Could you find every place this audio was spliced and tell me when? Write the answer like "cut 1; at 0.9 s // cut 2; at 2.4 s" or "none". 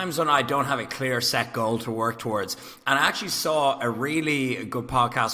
none